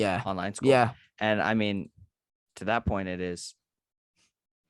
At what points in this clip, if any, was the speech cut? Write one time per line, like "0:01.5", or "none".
none